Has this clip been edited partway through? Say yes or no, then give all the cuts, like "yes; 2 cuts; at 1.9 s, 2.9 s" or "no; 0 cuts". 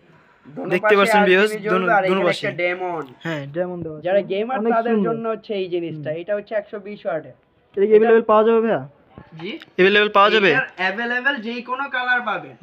no; 0 cuts